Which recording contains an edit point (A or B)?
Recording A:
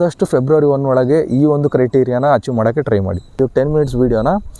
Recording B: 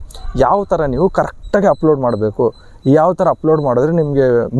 A